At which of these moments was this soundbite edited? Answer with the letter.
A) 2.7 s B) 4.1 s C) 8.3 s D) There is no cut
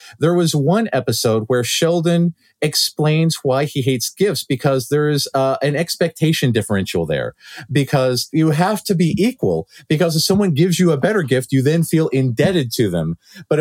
C